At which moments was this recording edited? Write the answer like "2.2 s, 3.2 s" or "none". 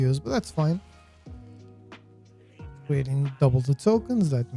none